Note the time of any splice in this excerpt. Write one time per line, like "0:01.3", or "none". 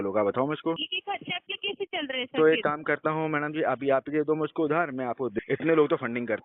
0:00.9
0:05.3